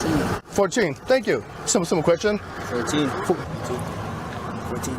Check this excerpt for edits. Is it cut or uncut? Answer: cut